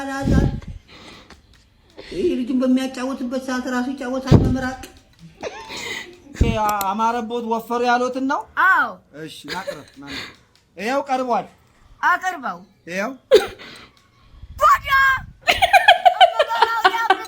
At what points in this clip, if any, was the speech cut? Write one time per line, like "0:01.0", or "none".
0:06.5